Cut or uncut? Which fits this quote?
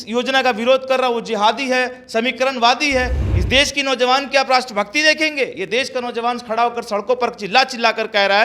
cut